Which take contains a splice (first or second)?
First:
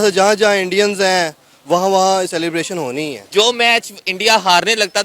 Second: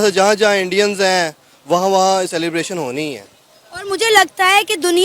first